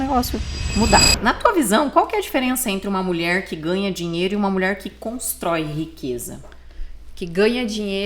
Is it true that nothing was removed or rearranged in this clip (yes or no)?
no